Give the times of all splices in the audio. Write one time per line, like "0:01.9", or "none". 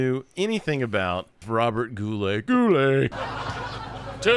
0:01.4
0:03.2